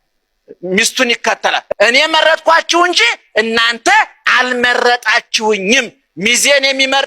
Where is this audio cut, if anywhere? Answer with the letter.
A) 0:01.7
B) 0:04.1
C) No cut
A